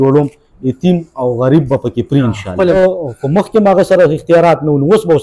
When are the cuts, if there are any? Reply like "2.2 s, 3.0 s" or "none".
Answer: 2.7 s